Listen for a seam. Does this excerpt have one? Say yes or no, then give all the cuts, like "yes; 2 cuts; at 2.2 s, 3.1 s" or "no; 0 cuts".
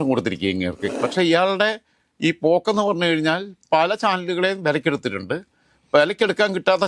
yes; 1 cut; at 1.1 s